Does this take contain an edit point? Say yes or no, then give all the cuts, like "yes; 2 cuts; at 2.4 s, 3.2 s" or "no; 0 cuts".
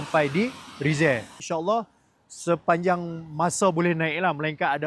yes; 1 cut; at 1.4 s